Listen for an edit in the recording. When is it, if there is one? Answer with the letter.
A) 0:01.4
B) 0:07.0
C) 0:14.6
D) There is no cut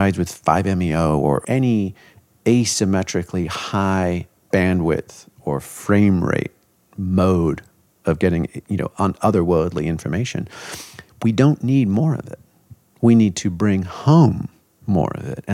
A